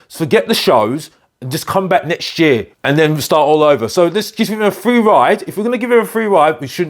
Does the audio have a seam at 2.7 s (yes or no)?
yes